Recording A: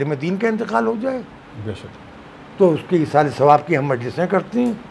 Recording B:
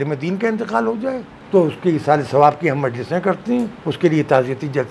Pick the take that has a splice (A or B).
B